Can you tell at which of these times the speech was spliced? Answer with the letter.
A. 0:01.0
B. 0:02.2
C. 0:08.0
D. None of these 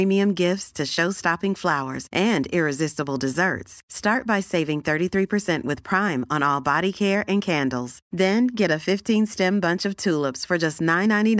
D